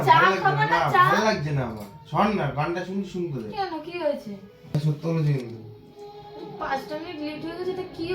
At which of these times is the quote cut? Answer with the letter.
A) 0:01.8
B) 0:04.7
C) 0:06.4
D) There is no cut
B